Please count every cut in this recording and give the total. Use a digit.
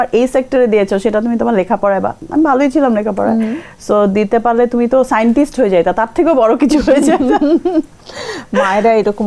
0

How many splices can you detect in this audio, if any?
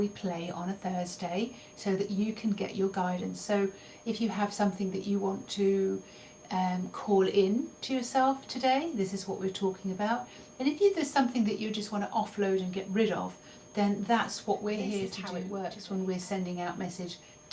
1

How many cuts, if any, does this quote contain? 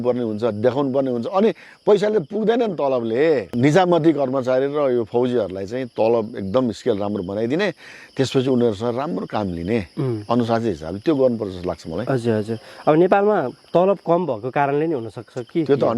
1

